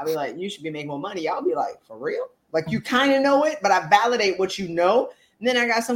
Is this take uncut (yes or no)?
yes